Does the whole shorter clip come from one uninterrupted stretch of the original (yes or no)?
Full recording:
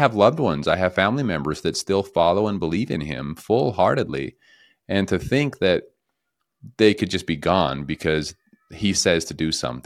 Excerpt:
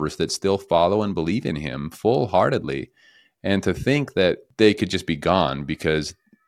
no